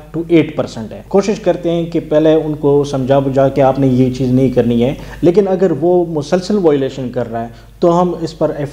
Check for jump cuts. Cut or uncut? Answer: cut